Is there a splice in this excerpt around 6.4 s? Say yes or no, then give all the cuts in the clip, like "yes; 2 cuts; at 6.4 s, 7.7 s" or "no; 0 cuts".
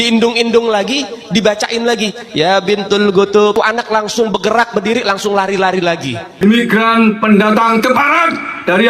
yes; 2 cuts; at 3.3 s, 6.4 s